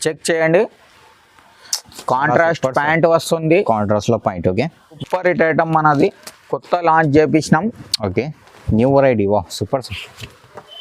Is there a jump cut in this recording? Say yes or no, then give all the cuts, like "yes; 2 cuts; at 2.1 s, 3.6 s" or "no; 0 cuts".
yes; 1 cut; at 4.9 s